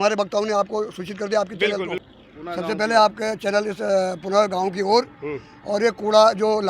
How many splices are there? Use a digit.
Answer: 1